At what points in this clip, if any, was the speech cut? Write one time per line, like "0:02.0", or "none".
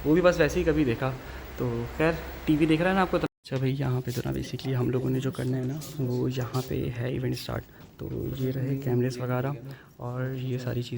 0:03.3